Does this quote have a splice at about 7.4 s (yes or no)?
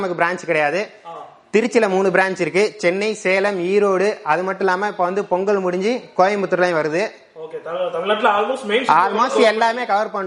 no